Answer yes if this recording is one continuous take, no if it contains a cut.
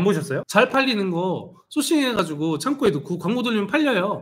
yes